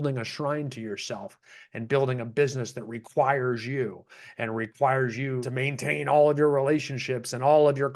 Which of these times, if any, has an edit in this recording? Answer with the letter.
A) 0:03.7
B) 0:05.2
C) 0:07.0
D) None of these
D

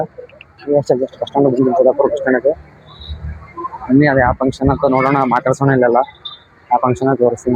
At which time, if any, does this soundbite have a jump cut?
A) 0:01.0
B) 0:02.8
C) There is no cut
C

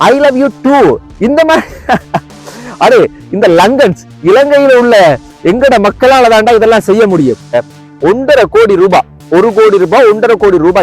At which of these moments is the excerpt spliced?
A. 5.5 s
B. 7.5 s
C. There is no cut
B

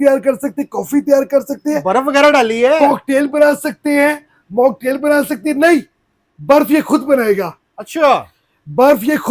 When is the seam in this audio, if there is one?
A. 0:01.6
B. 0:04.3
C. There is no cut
C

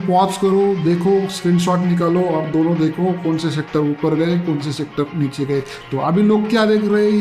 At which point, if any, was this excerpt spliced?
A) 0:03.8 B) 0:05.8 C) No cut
B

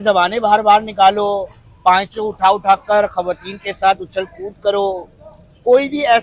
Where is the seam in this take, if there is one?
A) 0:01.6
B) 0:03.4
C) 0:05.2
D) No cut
D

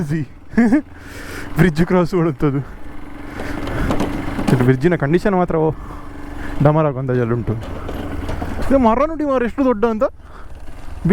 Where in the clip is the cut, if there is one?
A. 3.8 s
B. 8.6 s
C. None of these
B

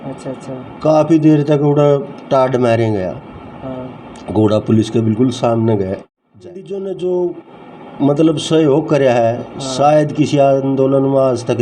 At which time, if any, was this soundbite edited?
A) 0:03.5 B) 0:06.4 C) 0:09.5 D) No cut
B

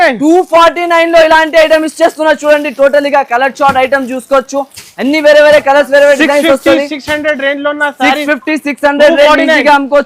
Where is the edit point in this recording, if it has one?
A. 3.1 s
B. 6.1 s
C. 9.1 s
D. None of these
D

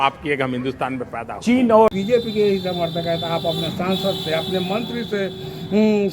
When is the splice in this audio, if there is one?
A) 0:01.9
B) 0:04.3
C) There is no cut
A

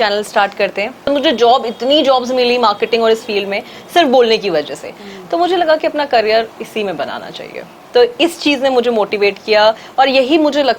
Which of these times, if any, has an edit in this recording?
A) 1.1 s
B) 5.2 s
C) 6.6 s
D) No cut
A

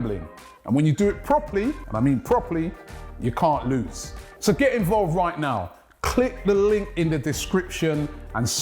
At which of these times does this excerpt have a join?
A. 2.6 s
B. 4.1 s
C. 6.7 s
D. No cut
B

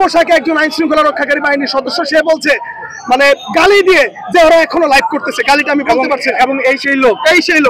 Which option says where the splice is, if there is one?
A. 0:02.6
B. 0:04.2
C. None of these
C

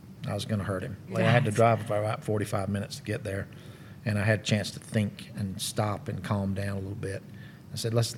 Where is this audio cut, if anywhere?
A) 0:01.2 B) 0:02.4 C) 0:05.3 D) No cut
A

